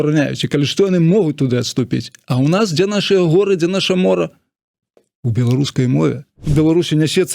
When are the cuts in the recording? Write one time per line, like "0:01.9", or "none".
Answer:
0:06.4